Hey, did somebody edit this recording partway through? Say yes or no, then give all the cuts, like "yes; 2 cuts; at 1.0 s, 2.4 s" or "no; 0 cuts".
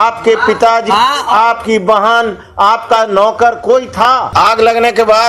yes; 1 cut; at 4.3 s